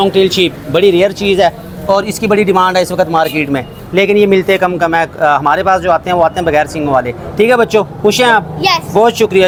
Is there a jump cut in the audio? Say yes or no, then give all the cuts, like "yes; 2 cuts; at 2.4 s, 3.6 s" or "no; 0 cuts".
no; 0 cuts